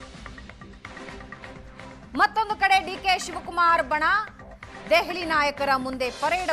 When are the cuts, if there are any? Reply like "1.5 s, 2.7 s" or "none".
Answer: 2.0 s

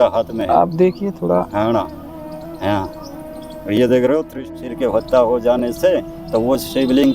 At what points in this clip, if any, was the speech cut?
4.4 s

